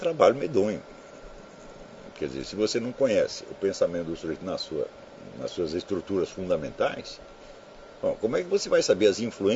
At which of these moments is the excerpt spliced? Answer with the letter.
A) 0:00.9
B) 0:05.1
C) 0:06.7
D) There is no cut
D